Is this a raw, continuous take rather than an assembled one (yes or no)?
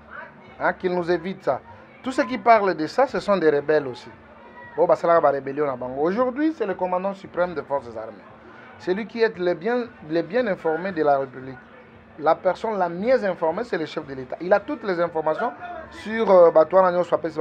yes